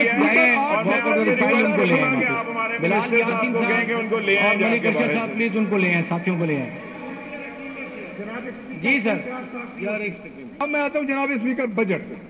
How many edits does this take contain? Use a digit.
1